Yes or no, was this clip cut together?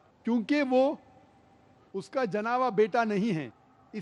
no